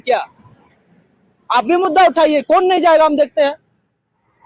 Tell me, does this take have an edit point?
no; 0 cuts

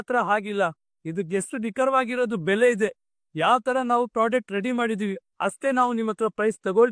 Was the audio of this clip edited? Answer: no; 0 cuts

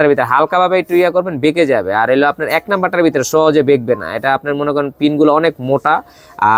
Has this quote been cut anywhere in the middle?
no; 0 cuts

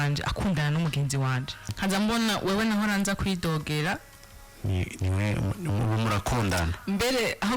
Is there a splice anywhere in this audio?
yes; 1 cut; at 1.7 s

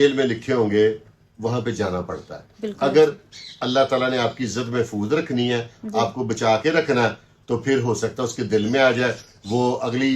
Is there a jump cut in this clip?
no; 0 cuts

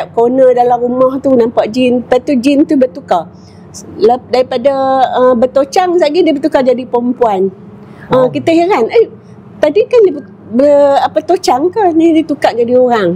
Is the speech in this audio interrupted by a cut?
no; 0 cuts

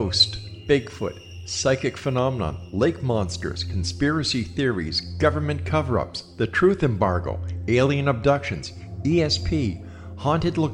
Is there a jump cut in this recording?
no; 0 cuts

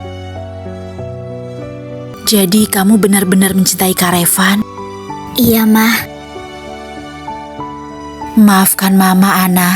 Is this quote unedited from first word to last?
no; 1 cut; at 2.2 s

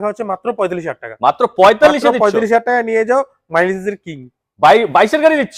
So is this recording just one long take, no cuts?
yes; 0 cuts

